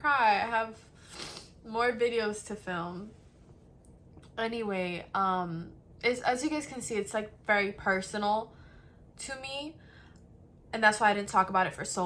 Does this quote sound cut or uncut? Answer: uncut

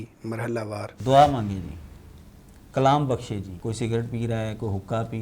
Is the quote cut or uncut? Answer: cut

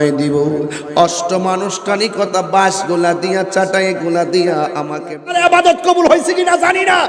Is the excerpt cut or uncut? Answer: cut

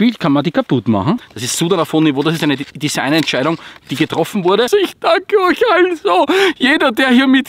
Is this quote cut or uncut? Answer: cut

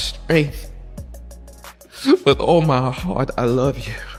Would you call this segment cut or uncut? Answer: uncut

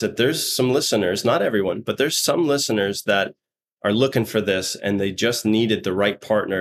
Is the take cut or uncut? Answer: uncut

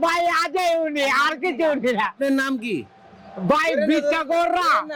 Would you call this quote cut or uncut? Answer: uncut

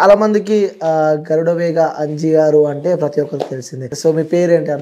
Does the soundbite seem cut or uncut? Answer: cut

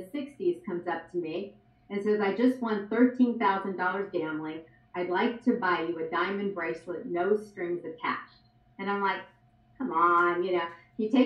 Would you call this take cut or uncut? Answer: uncut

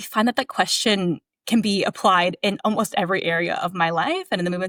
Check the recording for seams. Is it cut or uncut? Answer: uncut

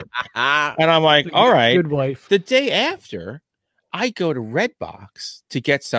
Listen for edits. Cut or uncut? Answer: cut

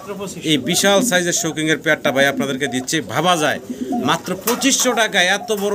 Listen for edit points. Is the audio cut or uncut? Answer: uncut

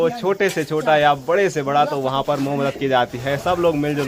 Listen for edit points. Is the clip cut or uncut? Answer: uncut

